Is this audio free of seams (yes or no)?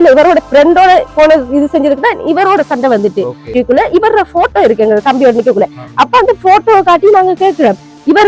no